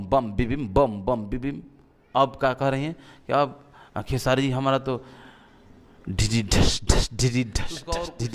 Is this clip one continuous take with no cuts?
yes; 0 cuts

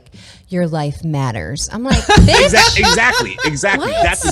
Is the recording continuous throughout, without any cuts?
yes; 0 cuts

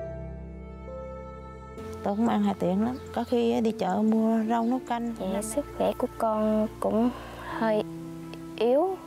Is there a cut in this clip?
yes; 1 cut; at 5.1 s

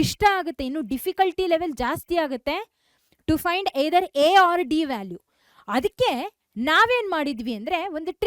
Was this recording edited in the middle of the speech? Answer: no; 0 cuts

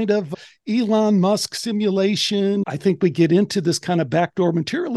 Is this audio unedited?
no; 1 cut; at 2.6 s

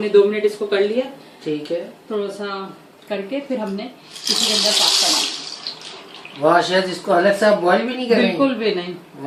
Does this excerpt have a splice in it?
no; 0 cuts

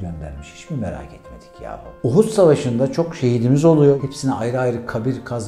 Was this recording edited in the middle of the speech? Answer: yes; 2 cuts; at 1.9 s, 4.0 s

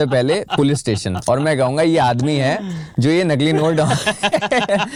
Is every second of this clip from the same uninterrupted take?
yes; 0 cuts

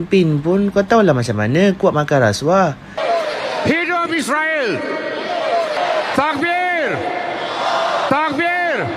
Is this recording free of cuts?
no; 1 cut; at 2.9 s

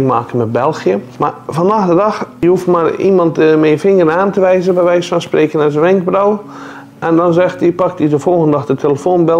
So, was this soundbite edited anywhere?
yes; 2 cuts; at 1.1 s, 2.3 s

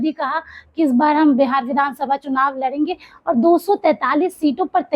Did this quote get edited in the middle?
no; 0 cuts

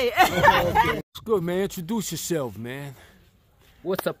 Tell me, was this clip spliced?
yes; 1 cut; at 1.0 s

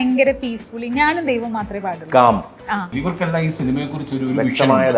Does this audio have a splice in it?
yes; 1 cut; at 2.9 s

